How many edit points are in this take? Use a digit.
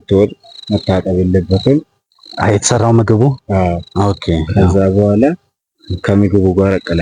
0